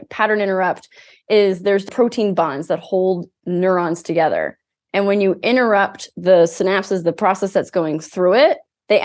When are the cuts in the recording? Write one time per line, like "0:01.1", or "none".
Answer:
0:01.9